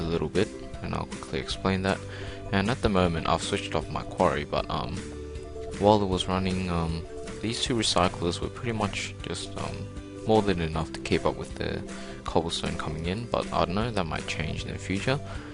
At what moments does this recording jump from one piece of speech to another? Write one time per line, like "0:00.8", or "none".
0:13.2